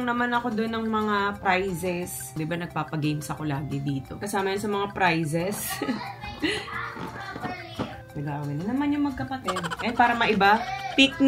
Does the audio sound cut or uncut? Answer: cut